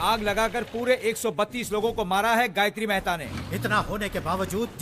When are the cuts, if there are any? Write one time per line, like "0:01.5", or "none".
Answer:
0:03.2